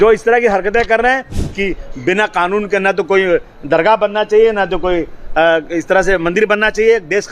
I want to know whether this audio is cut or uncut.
cut